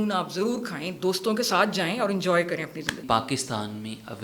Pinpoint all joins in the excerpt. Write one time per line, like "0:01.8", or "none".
0:03.0

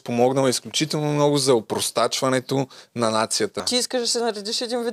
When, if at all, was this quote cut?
0:03.6

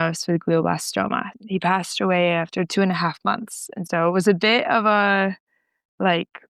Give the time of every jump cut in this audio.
0:01.4
0:03.8

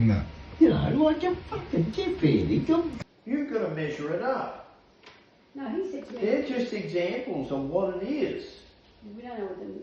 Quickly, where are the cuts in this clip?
0:03.0

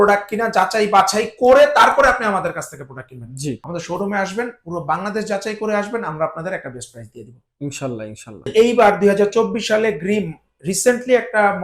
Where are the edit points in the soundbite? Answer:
0:03.6
0:08.5

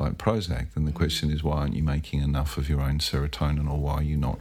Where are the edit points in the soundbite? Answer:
none

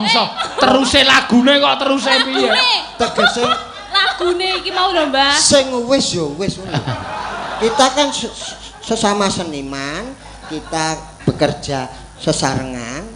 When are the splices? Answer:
none

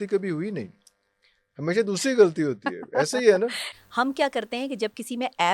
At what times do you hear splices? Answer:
0:03.7

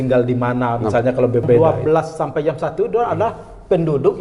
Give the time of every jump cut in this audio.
0:01.6

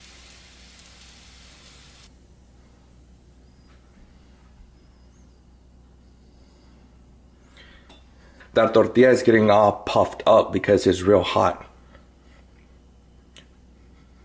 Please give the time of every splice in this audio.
0:02.1
0:08.4

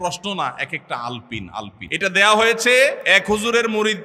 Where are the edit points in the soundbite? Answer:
0:01.8
0:03.0

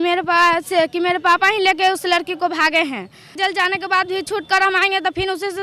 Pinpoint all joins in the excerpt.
0:03.3

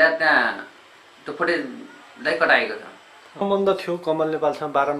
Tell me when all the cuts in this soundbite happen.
0:03.4

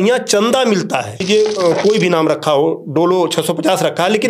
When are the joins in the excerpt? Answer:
0:01.2

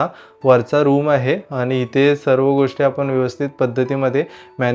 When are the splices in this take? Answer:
none

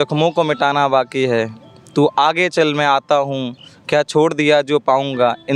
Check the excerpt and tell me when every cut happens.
none

